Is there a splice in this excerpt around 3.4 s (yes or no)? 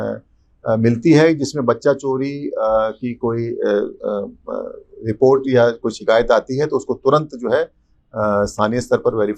no